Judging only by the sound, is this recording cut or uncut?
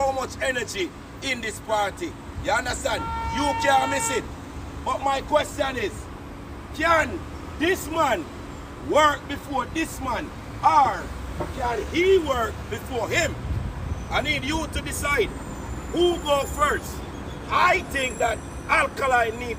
uncut